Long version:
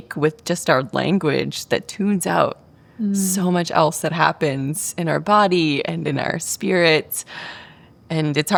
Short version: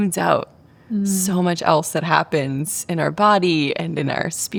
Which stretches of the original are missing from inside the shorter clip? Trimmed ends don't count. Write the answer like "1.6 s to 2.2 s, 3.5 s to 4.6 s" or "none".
none